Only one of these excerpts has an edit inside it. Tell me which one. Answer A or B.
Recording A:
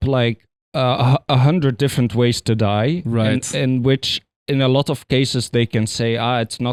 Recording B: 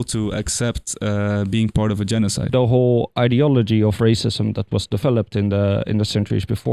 B